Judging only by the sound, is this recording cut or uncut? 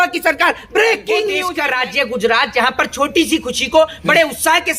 cut